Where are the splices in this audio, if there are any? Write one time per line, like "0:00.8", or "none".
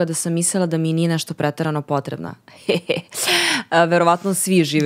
none